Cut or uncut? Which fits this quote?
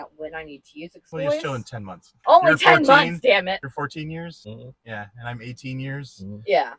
cut